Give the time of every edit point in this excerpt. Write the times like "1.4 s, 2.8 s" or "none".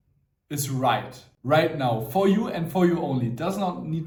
none